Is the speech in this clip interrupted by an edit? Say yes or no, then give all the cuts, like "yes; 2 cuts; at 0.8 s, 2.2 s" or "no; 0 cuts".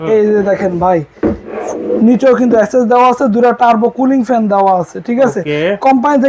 no; 0 cuts